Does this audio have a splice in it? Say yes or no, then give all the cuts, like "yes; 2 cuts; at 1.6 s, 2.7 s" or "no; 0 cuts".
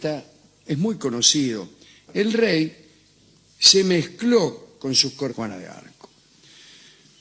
no; 0 cuts